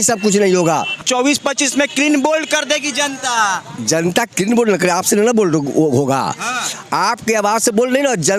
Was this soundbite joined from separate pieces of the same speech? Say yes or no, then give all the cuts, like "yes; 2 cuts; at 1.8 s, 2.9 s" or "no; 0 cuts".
yes; 1 cut; at 1.0 s